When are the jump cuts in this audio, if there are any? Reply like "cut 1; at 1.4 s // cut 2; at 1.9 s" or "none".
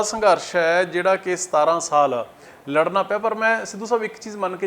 none